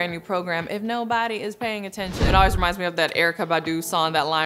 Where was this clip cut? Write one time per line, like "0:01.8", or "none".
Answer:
0:02.3